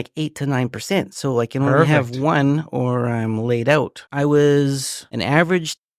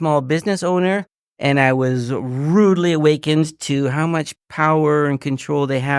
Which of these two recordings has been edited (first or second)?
first